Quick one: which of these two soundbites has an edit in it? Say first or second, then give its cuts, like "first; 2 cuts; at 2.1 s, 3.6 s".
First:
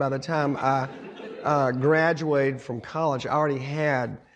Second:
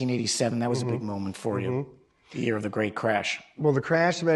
second; 1 cut; at 3.4 s